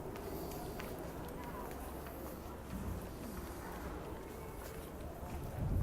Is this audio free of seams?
no; 2 cuts; at 1.4 s, 3.2 s

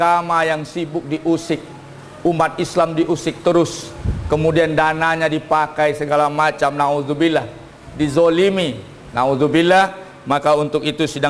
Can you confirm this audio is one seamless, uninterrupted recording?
yes; 0 cuts

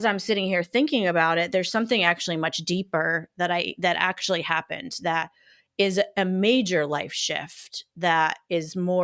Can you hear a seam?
no; 0 cuts

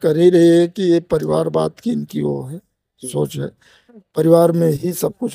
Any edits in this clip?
no; 0 cuts

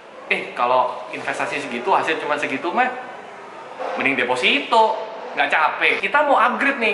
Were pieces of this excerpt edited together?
yes; 1 cut; at 6.0 s

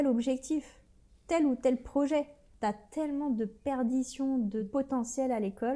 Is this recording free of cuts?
no; 2 cuts; at 2.4 s, 4.7 s

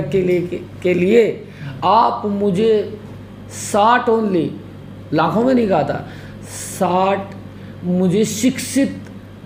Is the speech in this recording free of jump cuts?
yes; 0 cuts

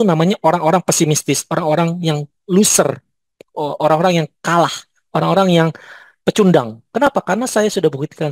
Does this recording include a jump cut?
no; 0 cuts

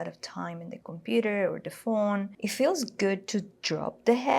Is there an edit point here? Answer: yes; 1 cut; at 2.4 s

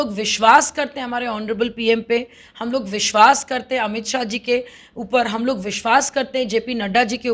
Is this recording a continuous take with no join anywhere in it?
yes; 0 cuts

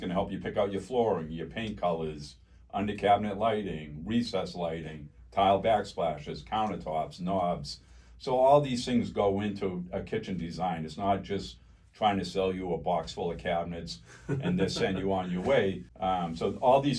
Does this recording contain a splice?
yes; 1 cut; at 15.9 s

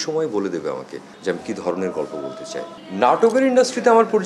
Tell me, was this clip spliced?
yes; 1 cut; at 2.7 s

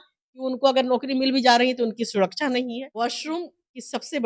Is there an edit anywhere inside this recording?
yes; 1 cut; at 2.8 s

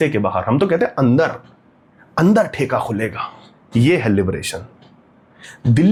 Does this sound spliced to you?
no; 0 cuts

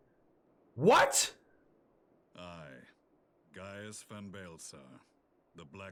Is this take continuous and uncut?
yes; 0 cuts

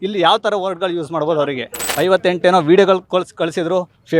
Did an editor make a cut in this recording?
yes; 1 cut; at 1.8 s

